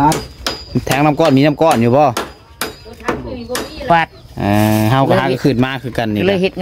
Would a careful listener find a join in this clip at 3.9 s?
yes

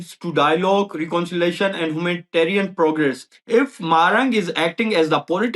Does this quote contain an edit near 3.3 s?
yes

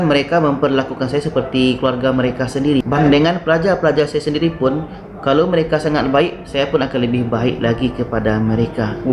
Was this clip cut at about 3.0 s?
yes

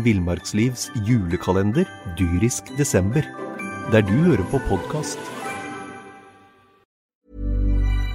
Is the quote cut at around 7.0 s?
yes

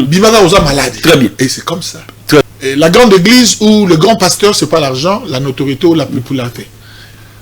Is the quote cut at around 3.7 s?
no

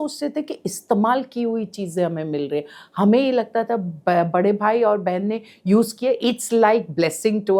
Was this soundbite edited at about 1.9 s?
no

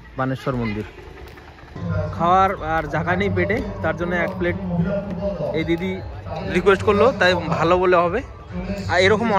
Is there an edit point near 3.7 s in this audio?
no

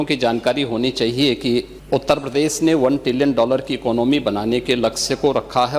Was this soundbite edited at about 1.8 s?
yes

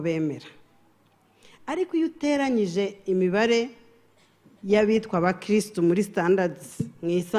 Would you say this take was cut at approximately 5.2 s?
no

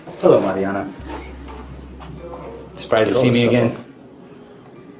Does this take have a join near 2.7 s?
no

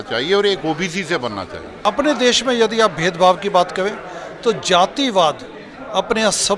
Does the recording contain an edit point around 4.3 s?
no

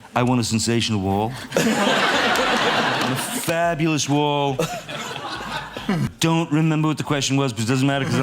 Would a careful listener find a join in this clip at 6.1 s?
yes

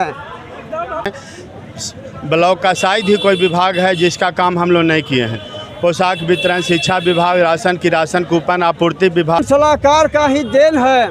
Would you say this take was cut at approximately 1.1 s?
yes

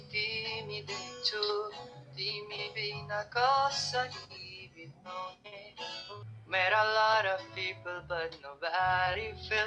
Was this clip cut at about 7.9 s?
no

